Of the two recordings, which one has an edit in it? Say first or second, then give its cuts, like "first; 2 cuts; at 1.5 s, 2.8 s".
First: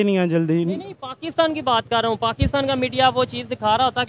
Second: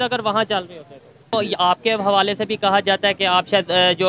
second; 1 cut; at 1.3 s